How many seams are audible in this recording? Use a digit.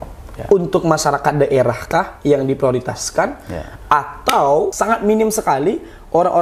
1